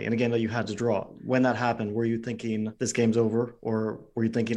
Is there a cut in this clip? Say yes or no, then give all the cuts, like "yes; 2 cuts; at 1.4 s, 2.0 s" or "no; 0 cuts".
yes; 1 cut; at 1.1 s